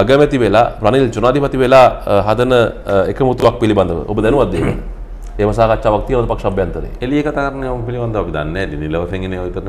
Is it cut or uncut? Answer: uncut